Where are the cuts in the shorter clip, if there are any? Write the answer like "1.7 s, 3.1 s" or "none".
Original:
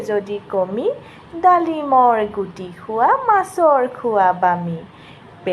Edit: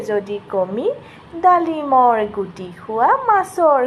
none